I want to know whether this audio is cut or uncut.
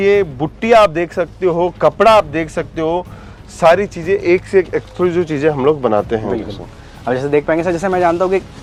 uncut